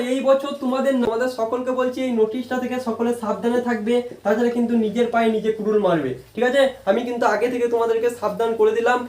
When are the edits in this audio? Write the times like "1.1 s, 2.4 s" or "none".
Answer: 1.1 s